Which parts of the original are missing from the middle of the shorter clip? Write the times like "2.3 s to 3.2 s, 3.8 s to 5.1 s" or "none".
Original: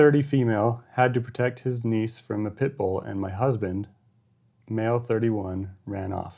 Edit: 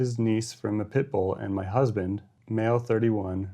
4.0 s to 4.5 s